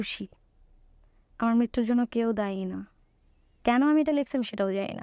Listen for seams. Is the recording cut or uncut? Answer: uncut